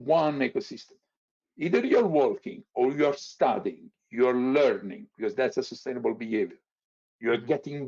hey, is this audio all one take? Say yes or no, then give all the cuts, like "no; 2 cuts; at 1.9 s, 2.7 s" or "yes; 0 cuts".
yes; 0 cuts